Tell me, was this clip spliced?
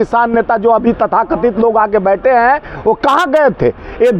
no; 0 cuts

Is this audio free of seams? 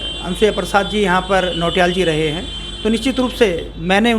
yes; 0 cuts

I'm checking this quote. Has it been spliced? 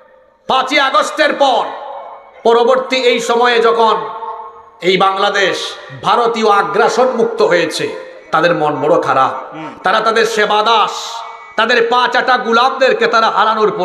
no; 0 cuts

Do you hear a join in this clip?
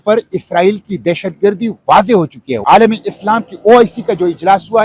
yes; 1 cut; at 2.5 s

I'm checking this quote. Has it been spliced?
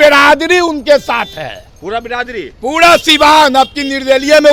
no; 0 cuts

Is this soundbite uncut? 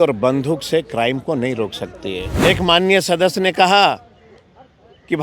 no; 1 cut; at 2.3 s

